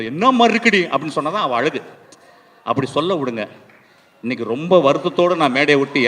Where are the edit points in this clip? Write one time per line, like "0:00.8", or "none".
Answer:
none